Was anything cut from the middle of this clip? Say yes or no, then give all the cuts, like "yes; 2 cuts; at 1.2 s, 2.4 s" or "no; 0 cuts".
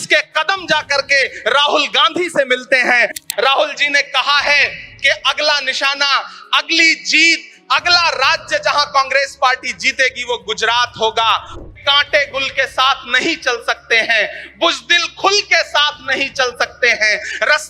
yes; 2 cuts; at 3.2 s, 11.5 s